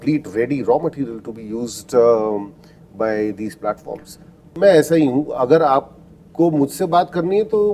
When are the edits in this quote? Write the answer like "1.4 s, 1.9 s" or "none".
4.5 s